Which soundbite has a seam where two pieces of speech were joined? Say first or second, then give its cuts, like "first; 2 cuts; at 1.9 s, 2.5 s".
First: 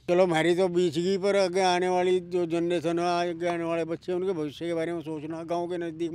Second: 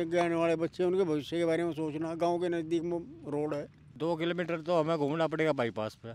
second; 1 cut; at 3.8 s